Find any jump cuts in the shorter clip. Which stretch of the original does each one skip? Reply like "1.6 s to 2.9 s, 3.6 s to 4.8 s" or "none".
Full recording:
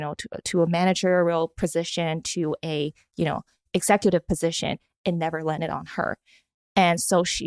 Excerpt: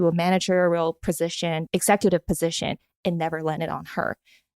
2.2 s to 3.6 s